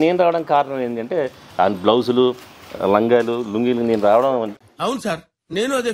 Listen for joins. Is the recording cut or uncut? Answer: uncut